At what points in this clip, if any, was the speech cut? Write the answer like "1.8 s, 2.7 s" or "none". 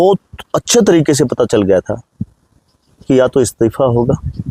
none